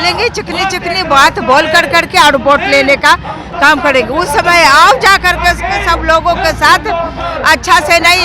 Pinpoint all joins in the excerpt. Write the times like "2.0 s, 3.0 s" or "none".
none